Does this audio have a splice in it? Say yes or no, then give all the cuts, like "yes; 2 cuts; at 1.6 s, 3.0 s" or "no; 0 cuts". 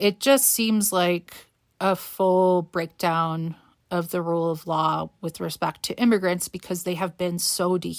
no; 0 cuts